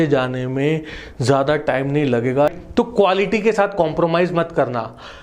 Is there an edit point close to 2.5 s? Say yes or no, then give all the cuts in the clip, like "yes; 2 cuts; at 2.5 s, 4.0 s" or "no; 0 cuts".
yes; 1 cut; at 2.5 s